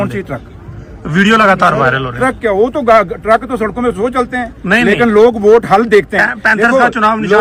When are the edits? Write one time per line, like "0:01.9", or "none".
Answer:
none